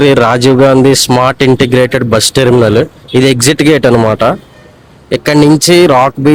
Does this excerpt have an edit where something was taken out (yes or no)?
no